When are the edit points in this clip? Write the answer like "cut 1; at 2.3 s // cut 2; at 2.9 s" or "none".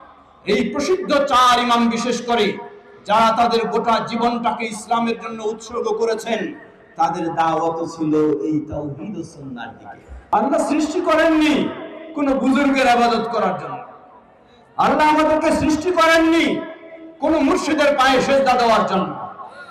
cut 1; at 10.3 s